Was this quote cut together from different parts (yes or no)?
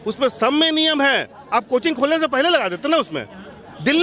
no